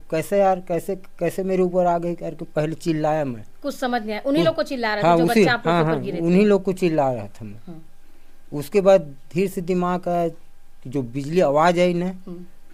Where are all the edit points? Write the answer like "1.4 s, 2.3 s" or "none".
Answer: none